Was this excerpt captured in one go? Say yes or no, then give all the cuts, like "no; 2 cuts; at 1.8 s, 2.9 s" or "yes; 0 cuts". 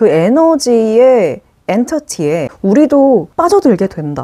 no; 2 cuts; at 2.5 s, 3.3 s